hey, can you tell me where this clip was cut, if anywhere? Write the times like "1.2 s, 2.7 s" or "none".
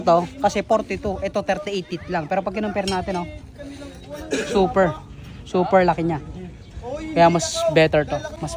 none